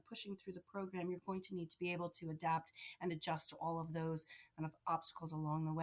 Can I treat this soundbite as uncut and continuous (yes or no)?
yes